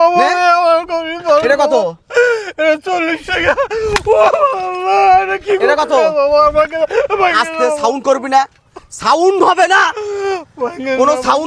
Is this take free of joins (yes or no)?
yes